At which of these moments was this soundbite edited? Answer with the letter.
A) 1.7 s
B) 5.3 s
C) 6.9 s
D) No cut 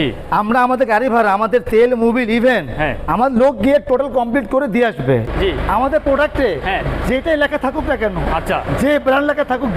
B